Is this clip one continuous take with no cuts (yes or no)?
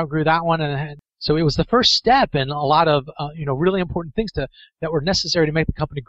no